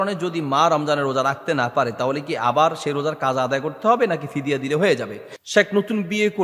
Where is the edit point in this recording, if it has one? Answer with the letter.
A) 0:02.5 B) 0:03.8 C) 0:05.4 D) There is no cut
C